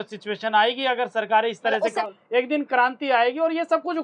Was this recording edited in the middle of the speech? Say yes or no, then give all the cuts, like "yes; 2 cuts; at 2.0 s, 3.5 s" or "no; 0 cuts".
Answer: yes; 1 cut; at 2.0 s